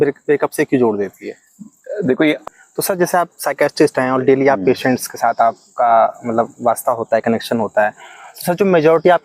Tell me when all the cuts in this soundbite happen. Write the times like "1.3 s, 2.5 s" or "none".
2.4 s